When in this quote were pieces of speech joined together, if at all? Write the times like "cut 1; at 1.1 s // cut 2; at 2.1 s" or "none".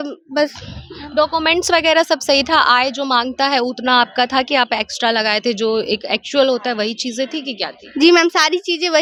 none